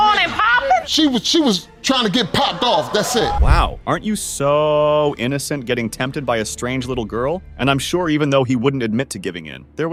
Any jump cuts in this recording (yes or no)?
no